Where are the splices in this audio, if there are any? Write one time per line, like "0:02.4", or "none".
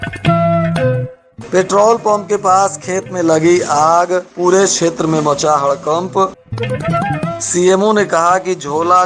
0:01.1